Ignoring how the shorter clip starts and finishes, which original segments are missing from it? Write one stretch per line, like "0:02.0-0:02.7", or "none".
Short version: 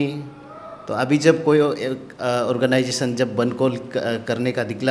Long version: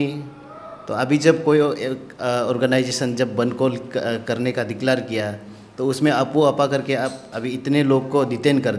none